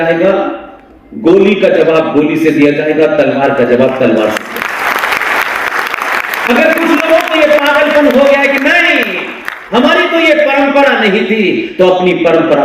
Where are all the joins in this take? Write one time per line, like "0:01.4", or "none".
0:04.7